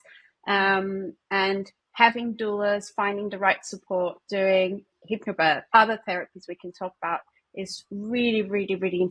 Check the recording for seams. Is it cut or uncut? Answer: cut